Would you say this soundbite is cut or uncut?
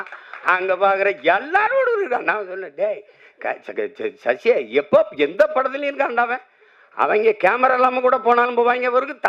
uncut